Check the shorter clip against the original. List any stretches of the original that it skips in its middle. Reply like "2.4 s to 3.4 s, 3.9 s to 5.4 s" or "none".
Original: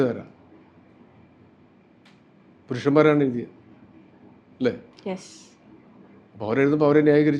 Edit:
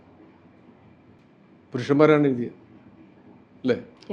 1.5 s to 2.2 s